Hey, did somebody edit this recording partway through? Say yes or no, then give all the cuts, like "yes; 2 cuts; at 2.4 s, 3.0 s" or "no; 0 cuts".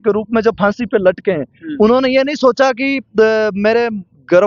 no; 0 cuts